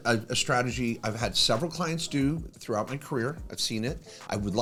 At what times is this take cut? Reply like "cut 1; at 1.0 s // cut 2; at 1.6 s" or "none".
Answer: none

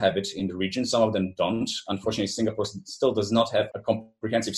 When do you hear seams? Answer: cut 1; at 3.7 s

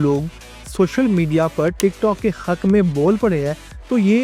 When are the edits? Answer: none

